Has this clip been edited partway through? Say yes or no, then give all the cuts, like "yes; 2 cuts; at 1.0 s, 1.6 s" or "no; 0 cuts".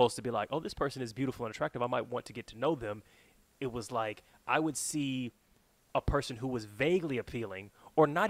no; 0 cuts